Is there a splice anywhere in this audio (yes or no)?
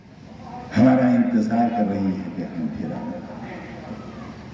no